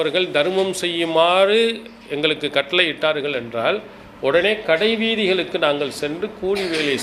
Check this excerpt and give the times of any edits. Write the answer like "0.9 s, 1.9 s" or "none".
none